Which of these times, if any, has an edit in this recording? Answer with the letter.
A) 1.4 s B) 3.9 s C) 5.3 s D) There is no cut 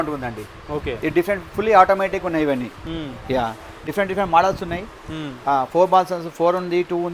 D